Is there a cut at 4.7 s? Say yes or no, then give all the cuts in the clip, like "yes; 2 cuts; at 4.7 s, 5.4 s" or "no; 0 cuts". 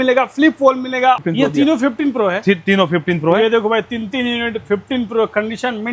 no; 1 cut; at 1.2 s